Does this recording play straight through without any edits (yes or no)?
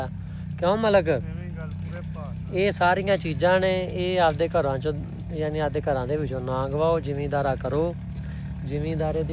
yes